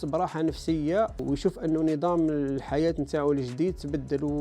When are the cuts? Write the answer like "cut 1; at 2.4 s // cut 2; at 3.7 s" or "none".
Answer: cut 1; at 1.2 s